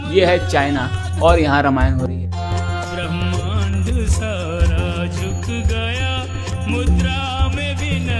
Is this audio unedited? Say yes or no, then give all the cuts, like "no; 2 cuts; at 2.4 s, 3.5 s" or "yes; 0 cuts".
yes; 0 cuts